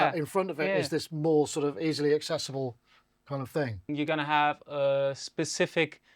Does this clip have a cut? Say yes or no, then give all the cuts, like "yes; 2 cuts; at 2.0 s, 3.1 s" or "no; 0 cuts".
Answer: yes; 1 cut; at 3.9 s